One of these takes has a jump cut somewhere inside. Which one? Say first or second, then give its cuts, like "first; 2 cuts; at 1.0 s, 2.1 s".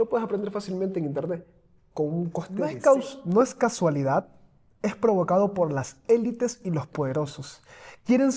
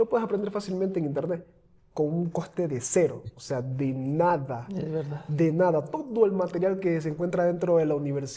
first; 1 cut; at 2.8 s